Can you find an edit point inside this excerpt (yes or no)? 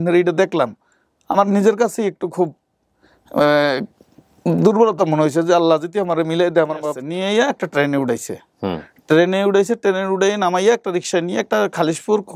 yes